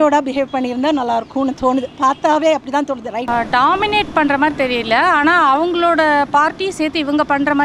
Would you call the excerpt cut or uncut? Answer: cut